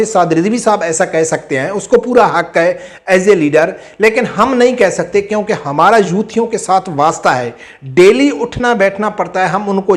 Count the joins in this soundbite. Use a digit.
0